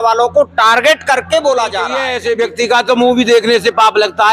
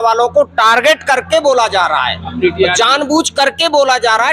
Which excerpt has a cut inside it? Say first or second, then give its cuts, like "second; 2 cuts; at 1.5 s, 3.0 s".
first; 1 cut; at 2.1 s